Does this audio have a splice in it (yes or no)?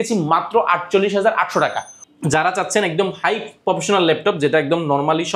yes